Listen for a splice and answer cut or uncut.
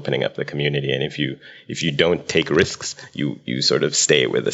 uncut